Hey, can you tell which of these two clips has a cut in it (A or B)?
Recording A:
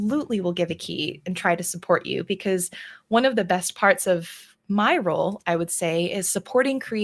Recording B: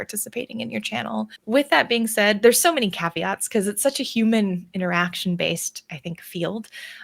B